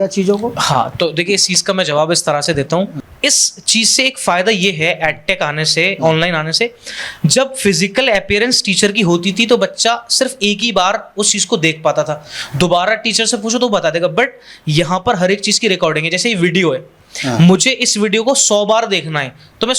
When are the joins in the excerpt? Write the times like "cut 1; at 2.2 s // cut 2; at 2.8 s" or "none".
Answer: cut 1; at 3.0 s